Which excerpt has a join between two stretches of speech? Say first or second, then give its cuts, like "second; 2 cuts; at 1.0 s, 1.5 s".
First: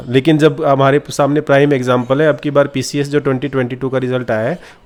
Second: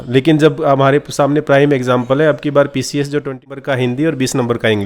second; 1 cut; at 3.5 s